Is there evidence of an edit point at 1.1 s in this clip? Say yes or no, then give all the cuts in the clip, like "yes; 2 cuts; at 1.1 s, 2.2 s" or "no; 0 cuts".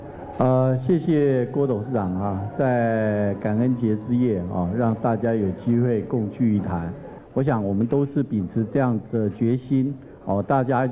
no; 1 cut; at 7.2 s